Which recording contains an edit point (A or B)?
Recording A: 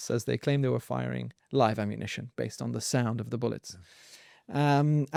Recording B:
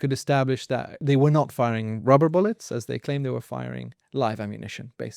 B